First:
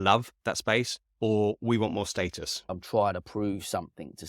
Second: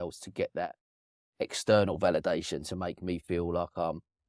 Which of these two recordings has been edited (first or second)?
first